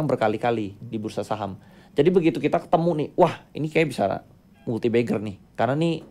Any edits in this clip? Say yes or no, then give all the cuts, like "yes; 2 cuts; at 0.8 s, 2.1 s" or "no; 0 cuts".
no; 0 cuts